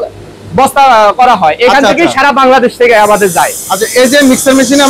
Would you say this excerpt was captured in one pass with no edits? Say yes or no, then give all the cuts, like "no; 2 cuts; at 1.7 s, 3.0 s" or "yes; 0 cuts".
yes; 0 cuts